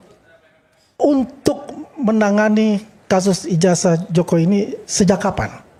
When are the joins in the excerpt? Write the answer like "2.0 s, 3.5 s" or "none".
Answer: none